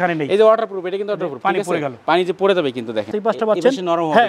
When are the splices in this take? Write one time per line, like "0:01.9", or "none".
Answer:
0:03.1